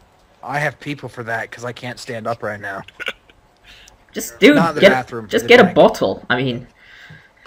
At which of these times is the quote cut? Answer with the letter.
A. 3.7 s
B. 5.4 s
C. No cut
C